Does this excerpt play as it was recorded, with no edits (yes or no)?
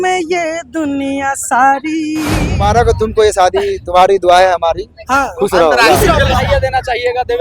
no